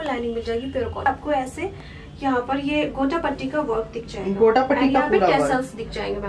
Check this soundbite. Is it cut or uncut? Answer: cut